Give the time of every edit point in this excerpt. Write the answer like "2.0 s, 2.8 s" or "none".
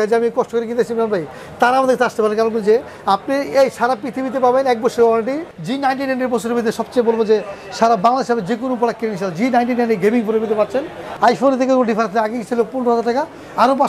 5.5 s, 11.0 s